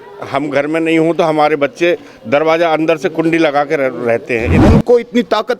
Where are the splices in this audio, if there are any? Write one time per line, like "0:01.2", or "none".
0:04.6